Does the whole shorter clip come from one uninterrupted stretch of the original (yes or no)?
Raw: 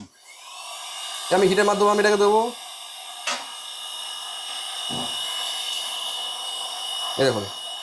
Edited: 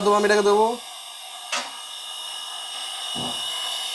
yes